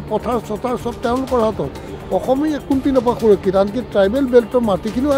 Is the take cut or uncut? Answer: uncut